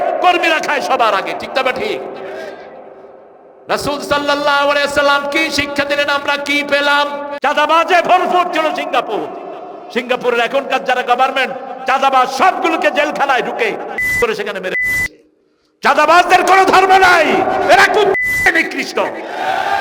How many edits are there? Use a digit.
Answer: 1